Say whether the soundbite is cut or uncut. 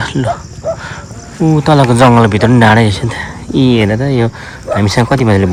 uncut